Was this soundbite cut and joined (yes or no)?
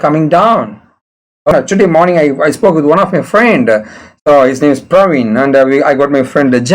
yes